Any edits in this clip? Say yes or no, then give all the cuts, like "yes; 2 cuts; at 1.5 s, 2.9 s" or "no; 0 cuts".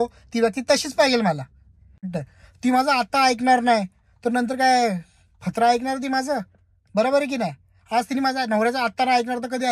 yes; 1 cut; at 2.0 s